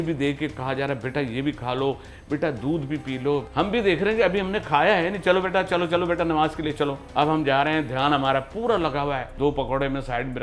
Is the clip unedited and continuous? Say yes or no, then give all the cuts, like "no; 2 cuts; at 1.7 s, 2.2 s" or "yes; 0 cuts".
no; 3 cuts; at 3.5 s, 7.0 s, 9.3 s